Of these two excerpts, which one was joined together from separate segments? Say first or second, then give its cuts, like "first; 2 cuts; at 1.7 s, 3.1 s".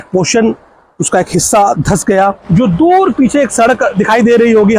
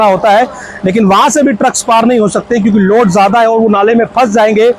first; 1 cut; at 2.4 s